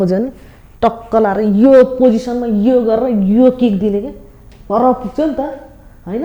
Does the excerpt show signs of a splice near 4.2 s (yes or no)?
no